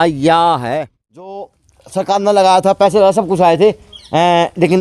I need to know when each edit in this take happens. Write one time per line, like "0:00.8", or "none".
0:01.4